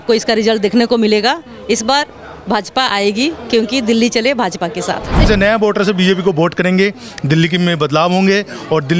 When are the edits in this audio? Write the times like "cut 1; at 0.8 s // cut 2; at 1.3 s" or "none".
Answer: cut 1; at 5.2 s